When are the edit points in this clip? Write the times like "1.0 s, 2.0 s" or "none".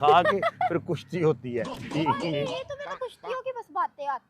1.8 s